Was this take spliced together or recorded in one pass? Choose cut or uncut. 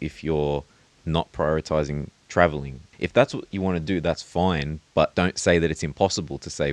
cut